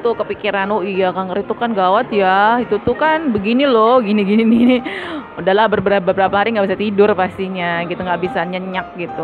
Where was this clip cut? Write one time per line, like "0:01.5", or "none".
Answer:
none